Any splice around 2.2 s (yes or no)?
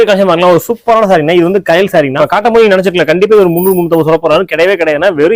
yes